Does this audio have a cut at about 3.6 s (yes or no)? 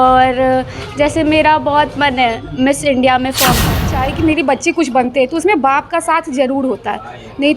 yes